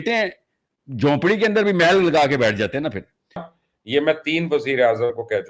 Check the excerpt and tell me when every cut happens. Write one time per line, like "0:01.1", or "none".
0:03.5

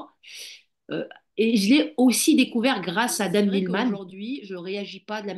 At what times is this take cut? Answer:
0:04.1

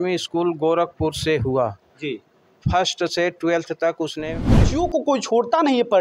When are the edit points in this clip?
0:04.7

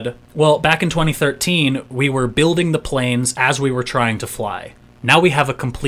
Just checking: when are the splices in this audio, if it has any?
none

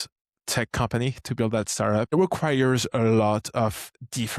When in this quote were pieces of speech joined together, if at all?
0:02.1

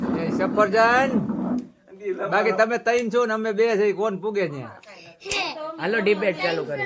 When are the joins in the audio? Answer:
none

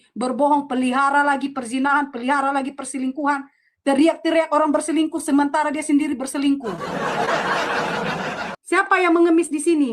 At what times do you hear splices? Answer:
0:08.5

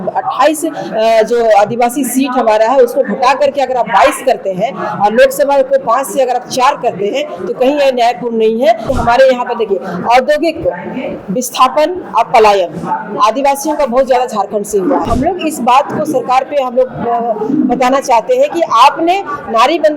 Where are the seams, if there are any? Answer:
0:08.9
0:15.1

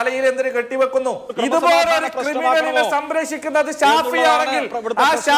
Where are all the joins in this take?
0:01.3

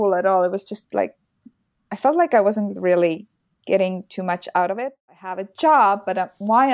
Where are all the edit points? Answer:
0:04.8

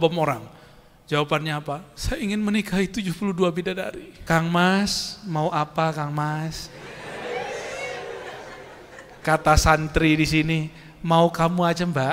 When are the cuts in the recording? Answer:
0:04.1

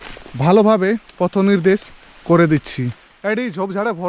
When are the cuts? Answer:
0:03.1

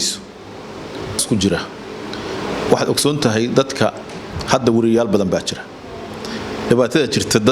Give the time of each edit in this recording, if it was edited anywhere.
0:01.2

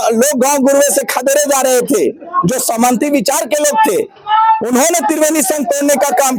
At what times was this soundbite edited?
none

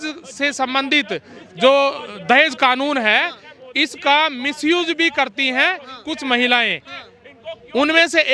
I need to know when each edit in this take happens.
none

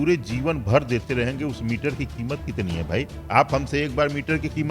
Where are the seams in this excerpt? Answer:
none

